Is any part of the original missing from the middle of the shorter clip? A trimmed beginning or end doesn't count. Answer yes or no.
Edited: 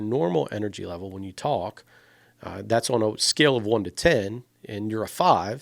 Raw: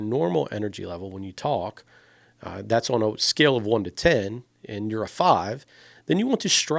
no